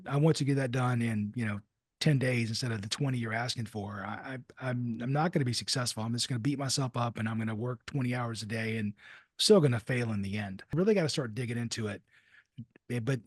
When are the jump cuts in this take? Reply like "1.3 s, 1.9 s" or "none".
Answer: 10.8 s

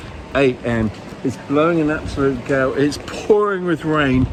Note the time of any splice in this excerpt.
none

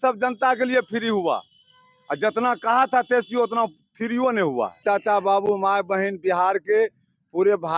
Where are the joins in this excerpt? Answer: 4.8 s

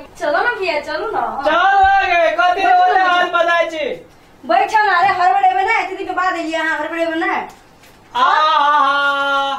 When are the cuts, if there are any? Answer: none

